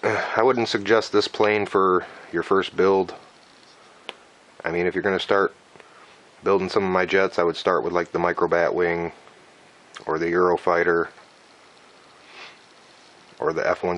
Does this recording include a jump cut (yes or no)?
yes